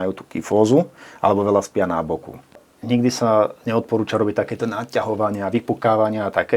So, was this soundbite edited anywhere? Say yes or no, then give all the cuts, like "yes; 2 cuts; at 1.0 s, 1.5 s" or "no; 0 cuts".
yes; 1 cut; at 2.7 s